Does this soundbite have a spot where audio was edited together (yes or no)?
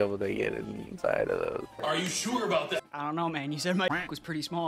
yes